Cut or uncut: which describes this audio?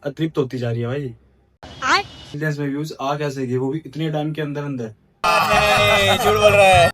cut